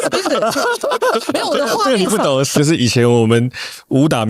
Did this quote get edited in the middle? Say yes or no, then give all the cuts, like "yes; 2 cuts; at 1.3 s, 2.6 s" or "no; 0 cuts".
yes; 1 cut; at 2.6 s